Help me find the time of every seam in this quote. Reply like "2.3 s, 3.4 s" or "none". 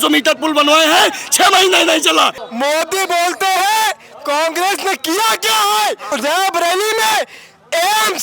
2.4 s, 6.0 s